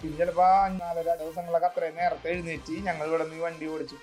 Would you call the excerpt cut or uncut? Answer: cut